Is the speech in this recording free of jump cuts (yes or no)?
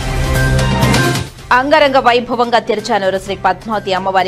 no